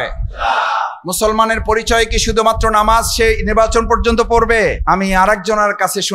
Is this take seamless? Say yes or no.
no